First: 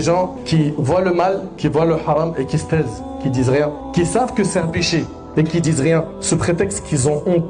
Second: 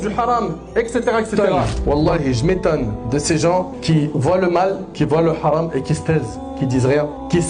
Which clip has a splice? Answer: second; 1 cut; at 1.8 s

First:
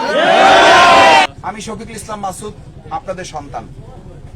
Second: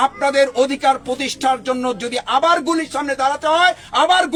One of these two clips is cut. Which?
first; 1 cut; at 1.3 s

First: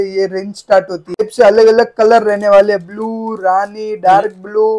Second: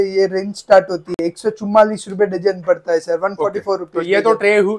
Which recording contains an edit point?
first; 1 cut; at 1.2 s

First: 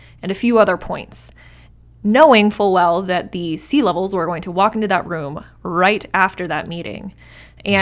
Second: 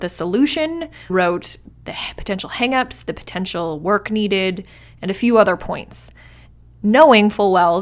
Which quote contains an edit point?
second; 1 cut; at 1.1 s

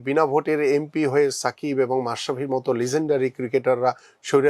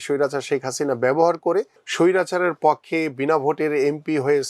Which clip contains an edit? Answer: second; 1 cut; at 1.8 s

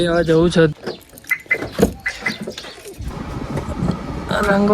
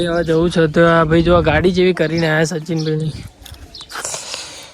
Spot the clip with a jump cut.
first; 2 cuts; at 0.7 s, 3.1 s

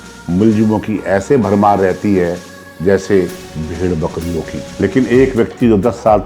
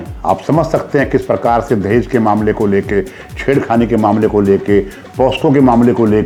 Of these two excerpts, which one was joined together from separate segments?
first; 1 cut; at 4.7 s

